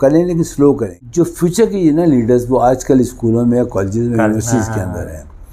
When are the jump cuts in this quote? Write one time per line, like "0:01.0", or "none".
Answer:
0:01.0